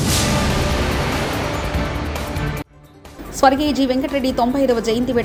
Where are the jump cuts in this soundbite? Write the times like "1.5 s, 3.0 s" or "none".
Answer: none